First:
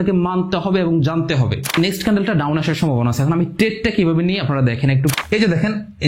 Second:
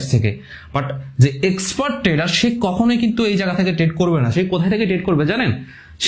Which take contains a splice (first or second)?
first